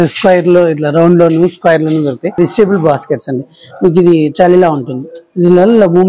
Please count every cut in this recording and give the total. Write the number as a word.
one